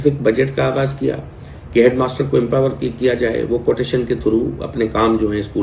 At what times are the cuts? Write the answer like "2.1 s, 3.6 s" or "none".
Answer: none